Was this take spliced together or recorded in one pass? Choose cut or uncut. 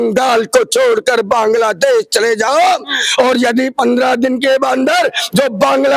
uncut